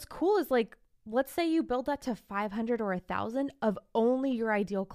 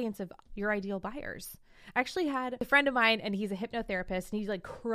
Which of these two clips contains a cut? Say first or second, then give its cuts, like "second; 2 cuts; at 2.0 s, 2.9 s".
second; 1 cut; at 2.6 s